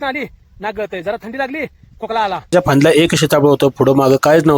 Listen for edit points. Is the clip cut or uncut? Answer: cut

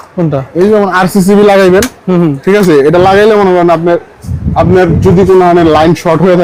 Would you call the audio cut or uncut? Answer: uncut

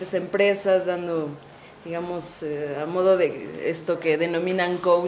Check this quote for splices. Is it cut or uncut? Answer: cut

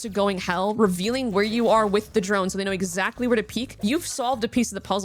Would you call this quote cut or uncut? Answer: uncut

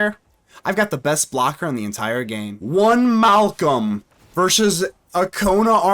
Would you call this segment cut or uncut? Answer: cut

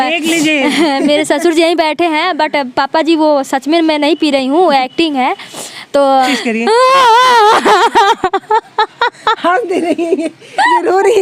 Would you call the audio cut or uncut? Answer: cut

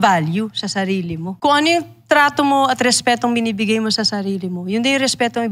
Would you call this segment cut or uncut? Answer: cut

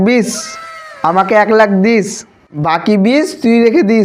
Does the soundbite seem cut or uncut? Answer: uncut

